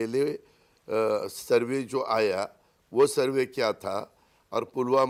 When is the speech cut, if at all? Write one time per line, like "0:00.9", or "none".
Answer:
none